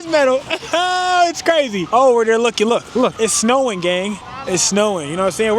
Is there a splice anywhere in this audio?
yes; 3 cuts; at 1.8 s, 3.1 s, 4.3 s

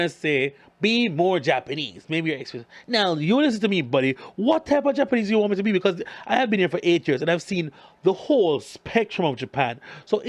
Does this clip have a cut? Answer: no; 0 cuts

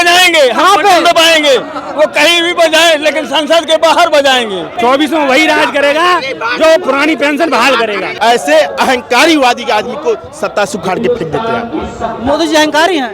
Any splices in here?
yes; 2 cuts; at 4.7 s, 8.1 s

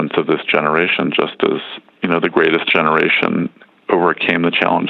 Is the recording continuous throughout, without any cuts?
yes; 0 cuts

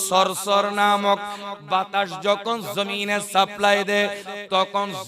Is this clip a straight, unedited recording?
no; 1 cut; at 1.4 s

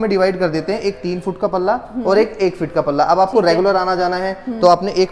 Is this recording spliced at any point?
no; 0 cuts

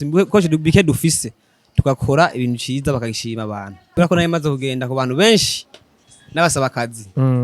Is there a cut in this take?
yes; 1 cut; at 3.8 s

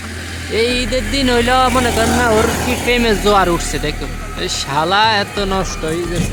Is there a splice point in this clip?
no; 0 cuts

